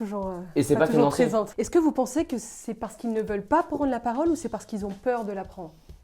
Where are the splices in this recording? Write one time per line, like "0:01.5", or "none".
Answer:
0:01.5